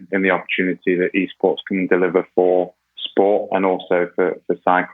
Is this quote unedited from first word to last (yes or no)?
yes